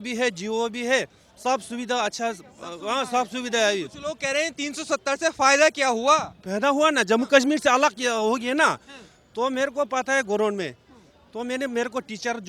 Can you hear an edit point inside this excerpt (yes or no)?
no